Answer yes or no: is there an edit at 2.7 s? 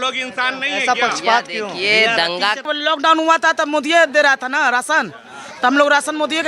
yes